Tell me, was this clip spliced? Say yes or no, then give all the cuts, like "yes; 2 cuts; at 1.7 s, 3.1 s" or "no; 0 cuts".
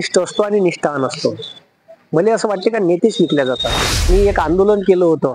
yes; 1 cut; at 4.1 s